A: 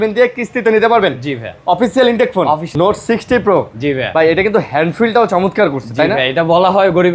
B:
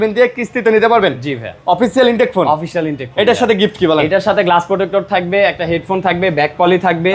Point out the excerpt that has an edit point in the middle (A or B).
A